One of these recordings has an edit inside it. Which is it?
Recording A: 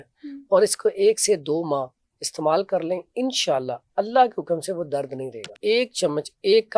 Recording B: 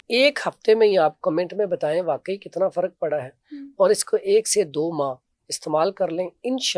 A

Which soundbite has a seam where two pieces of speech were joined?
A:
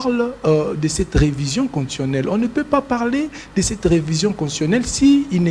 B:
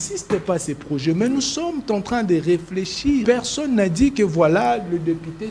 B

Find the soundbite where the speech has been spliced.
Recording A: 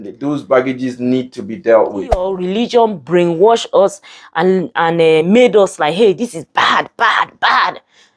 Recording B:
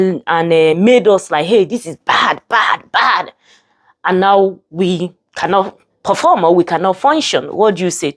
A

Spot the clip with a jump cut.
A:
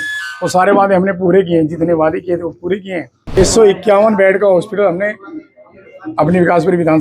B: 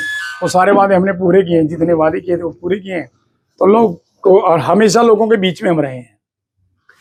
A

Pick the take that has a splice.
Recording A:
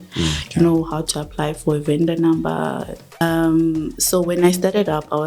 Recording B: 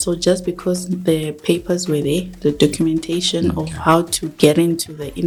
A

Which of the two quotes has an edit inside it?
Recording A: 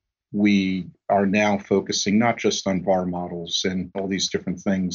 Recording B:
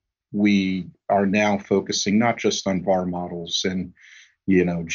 A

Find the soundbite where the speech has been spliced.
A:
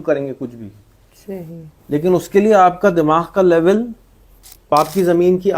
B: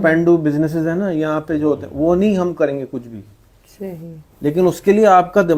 A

